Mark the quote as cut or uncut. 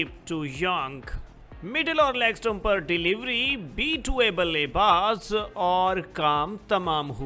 uncut